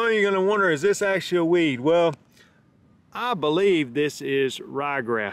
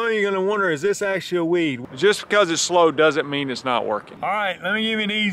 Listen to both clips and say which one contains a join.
second; 2 cuts; at 1.8 s, 4.1 s

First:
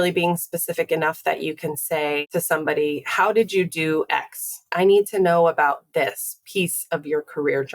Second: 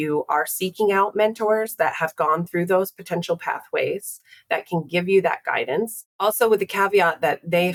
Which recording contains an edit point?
first; 2 cuts; at 2.3 s, 4.7 s

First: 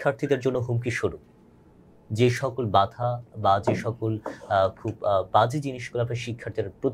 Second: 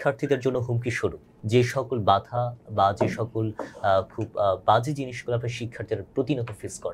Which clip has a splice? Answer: second; 1 cut; at 1.3 s

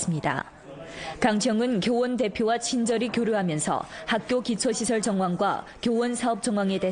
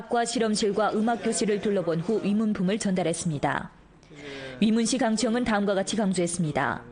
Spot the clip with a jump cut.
first; 1 cut; at 5.7 s

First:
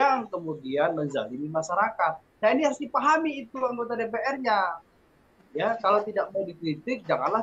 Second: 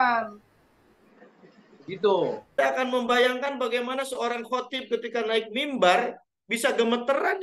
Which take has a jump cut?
second; 1 cut; at 2.5 s

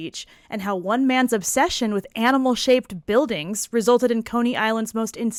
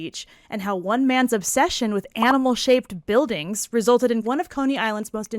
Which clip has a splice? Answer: second; 1 cut; at 4.2 s

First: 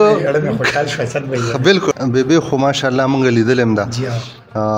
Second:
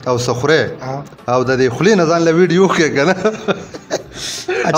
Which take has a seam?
first; 1 cut; at 1.9 s

